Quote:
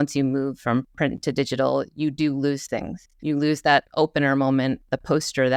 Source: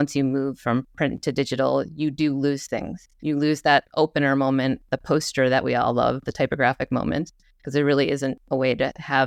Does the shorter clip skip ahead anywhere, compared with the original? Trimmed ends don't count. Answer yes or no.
no